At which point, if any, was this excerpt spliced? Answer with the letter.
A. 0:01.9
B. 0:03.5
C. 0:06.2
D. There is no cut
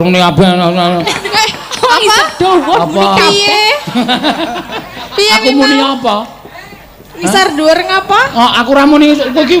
D